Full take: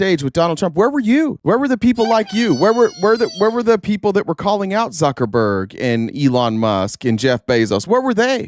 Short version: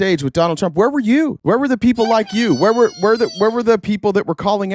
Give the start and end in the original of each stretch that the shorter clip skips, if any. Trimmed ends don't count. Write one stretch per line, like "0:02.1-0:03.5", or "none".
none